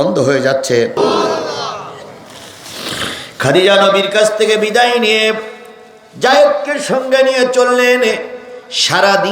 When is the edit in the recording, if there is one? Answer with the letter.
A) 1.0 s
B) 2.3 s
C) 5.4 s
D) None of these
A